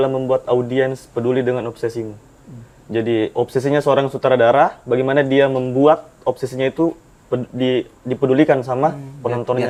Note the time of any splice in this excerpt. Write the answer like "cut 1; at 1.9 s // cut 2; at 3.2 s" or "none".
none